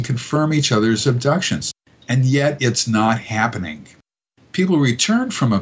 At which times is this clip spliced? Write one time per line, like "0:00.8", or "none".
0:01.7